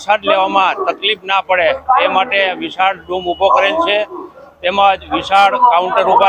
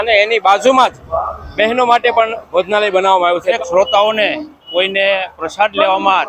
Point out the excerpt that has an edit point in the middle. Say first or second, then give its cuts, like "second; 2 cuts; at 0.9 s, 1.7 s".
second; 1 cut; at 3.6 s